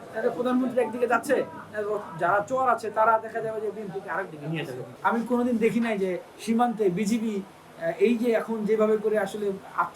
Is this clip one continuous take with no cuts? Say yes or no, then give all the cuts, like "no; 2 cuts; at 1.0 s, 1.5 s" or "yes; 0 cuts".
no; 1 cut; at 4.8 s